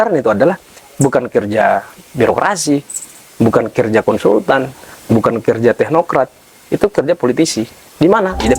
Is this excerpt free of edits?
yes; 0 cuts

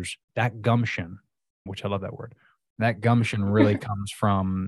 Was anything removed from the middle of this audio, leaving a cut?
no; 0 cuts

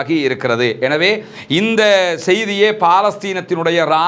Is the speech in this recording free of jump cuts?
yes; 0 cuts

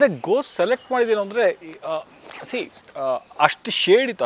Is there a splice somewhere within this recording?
no; 0 cuts

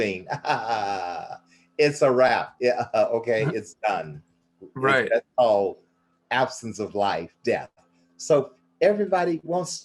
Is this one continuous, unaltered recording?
yes; 0 cuts

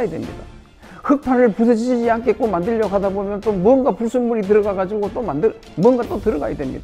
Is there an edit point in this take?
no; 0 cuts

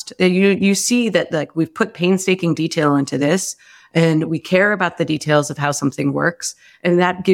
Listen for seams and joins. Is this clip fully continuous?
yes; 0 cuts

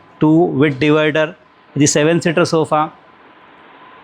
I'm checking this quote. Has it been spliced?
no; 0 cuts

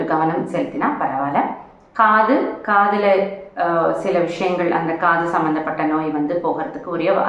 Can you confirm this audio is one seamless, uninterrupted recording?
yes; 0 cuts

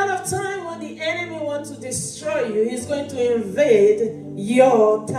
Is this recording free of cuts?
yes; 0 cuts

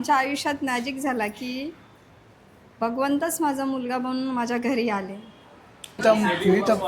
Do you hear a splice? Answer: yes; 1 cut; at 6.0 s

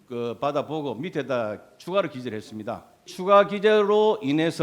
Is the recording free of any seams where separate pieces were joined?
no; 1 cut; at 3.1 s

